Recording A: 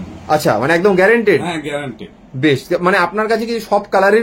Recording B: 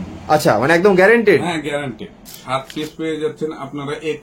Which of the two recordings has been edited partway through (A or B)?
B